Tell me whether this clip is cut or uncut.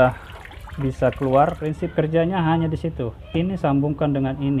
cut